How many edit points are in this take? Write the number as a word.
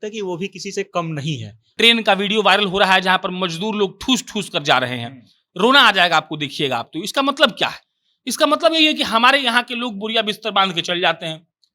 one